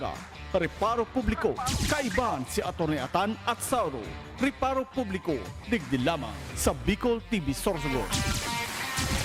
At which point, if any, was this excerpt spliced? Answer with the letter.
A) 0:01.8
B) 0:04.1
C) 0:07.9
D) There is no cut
D